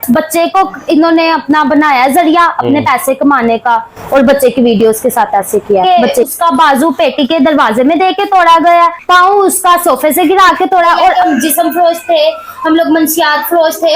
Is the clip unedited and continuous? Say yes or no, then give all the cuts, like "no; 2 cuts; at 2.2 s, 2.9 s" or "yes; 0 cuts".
no; 2 cuts; at 6.1 s, 11.1 s